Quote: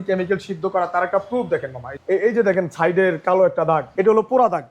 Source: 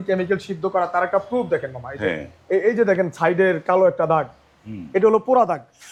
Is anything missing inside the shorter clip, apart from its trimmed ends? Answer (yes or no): yes